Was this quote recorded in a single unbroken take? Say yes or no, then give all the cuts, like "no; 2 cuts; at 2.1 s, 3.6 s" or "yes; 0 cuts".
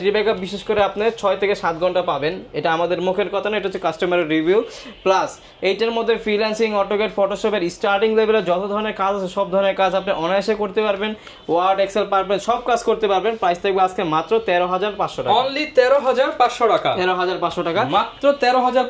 yes; 0 cuts